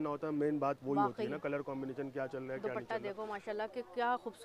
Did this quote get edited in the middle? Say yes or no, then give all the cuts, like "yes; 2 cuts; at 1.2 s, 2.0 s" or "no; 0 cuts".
no; 0 cuts